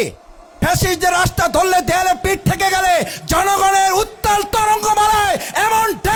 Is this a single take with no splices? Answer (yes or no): yes